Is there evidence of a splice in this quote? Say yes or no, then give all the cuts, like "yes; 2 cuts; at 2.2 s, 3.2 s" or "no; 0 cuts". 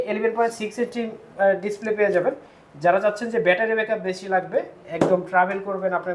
no; 0 cuts